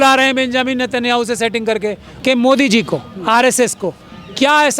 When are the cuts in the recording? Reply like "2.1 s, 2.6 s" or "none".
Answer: 2.1 s